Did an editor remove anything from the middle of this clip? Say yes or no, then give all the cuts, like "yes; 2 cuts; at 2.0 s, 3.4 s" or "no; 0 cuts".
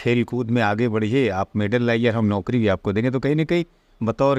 no; 0 cuts